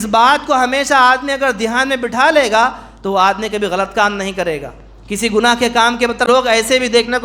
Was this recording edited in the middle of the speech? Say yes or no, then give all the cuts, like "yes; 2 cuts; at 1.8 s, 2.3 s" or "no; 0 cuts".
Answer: yes; 1 cut; at 6.3 s